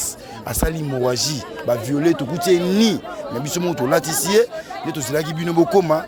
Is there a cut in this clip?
no; 0 cuts

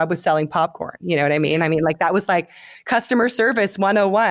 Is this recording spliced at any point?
no; 0 cuts

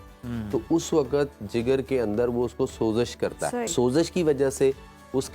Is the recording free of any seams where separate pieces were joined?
no; 1 cut; at 3.7 s

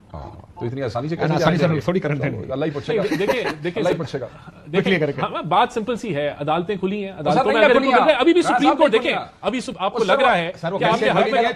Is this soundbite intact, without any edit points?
yes; 0 cuts

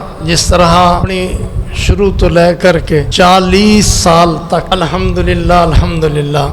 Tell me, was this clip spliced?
yes; 3 cuts; at 1.1 s, 3.1 s, 4.7 s

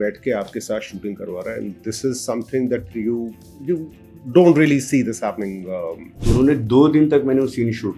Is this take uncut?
no; 1 cut; at 6.1 s

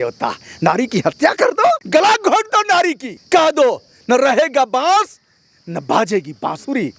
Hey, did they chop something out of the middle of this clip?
yes; 2 cuts; at 1.8 s, 3.1 s

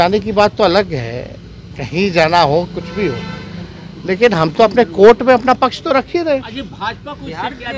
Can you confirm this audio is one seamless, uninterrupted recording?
yes; 0 cuts

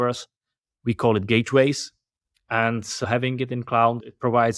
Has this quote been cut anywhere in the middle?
no; 0 cuts

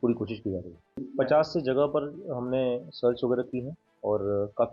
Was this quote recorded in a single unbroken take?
no; 1 cut; at 0.9 s

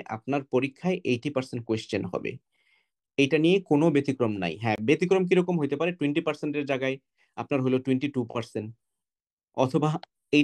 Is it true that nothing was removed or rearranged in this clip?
yes; 0 cuts

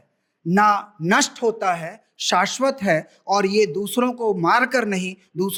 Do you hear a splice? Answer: no; 0 cuts

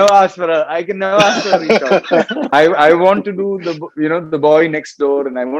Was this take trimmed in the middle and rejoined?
yes; 1 cut; at 2.4 s

